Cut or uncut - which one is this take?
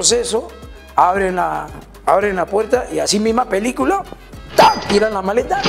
uncut